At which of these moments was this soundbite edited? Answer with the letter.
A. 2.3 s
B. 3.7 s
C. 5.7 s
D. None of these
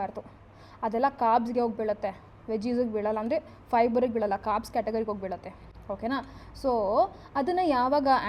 D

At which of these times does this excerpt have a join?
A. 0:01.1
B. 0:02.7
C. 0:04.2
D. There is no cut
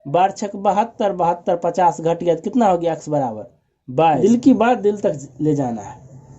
C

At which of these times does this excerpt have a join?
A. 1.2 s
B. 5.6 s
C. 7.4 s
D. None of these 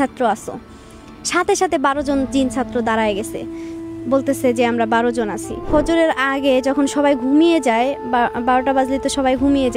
B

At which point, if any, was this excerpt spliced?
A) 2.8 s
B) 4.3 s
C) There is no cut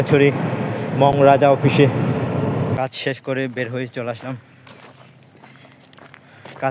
A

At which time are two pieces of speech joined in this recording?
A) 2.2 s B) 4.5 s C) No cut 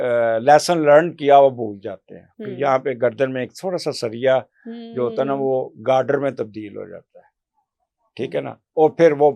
C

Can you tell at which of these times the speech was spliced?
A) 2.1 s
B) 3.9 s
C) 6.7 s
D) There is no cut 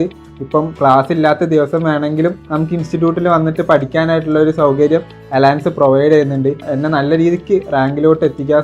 C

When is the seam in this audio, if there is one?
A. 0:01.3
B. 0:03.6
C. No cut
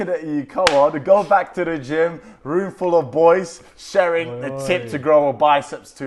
C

